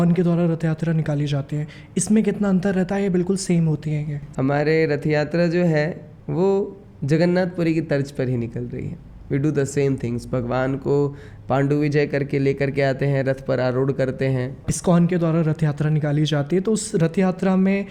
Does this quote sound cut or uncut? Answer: cut